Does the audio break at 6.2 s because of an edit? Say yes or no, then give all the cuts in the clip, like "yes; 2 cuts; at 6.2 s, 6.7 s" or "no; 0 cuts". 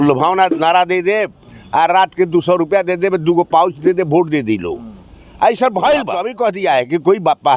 yes; 1 cut; at 6.2 s